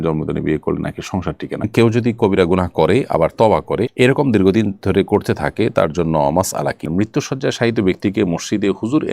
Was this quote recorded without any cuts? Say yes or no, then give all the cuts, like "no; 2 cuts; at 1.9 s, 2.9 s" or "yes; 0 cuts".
no; 2 cuts; at 1.7 s, 6.9 s